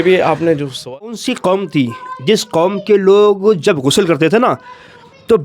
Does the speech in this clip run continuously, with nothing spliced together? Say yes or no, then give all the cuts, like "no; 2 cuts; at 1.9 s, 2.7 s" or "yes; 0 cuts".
no; 1 cut; at 1.0 s